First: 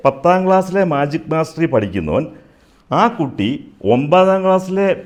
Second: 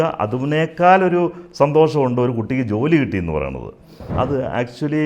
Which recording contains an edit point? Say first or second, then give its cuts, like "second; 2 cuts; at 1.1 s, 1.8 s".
second; 1 cut; at 3.8 s